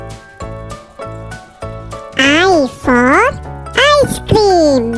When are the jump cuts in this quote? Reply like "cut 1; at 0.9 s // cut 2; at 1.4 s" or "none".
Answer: cut 1; at 2.0 s